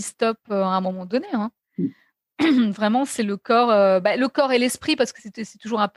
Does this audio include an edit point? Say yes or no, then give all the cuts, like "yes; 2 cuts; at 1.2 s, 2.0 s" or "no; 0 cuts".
no; 0 cuts